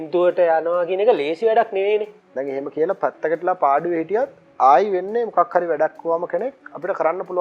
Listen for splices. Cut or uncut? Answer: cut